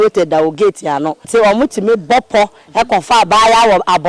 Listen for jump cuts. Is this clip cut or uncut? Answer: cut